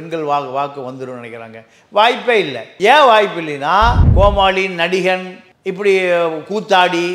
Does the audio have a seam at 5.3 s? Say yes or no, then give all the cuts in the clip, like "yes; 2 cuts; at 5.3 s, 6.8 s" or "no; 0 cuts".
no; 2 cuts; at 2.6 s, 4.0 s